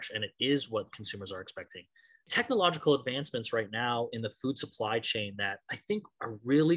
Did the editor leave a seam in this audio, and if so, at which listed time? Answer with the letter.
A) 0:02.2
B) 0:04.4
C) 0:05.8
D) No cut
A